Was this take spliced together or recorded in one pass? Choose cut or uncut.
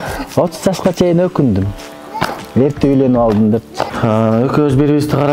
cut